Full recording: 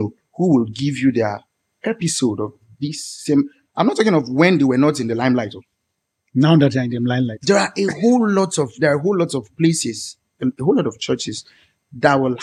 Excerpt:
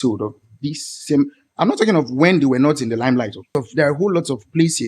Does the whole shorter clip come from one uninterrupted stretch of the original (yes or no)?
no